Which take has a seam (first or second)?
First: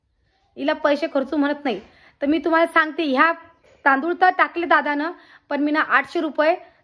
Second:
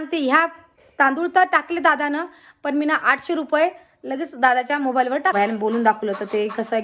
second